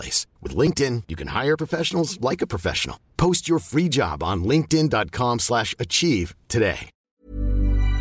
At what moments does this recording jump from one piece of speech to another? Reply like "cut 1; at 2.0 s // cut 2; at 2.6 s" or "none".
cut 1; at 7.1 s